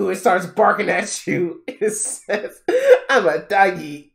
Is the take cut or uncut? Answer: uncut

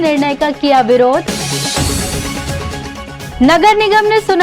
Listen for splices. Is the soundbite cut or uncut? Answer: uncut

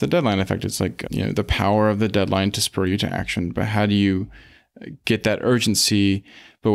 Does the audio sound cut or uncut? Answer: cut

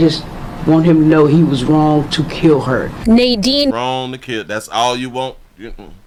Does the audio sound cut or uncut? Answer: uncut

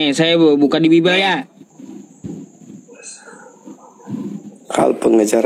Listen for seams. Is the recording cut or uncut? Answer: cut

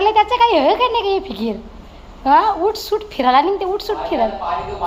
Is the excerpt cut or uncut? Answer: uncut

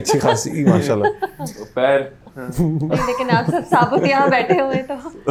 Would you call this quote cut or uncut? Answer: uncut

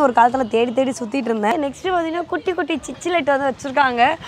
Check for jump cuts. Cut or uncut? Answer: cut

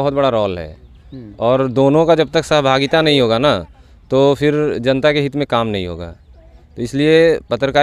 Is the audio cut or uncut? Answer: uncut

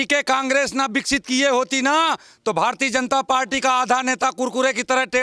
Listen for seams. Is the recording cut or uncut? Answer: uncut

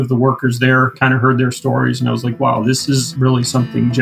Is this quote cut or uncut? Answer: cut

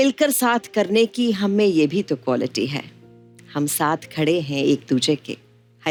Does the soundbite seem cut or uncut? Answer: uncut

